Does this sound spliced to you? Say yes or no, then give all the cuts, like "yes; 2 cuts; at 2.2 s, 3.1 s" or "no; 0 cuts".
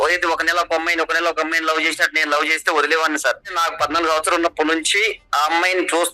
yes; 1 cut; at 3.5 s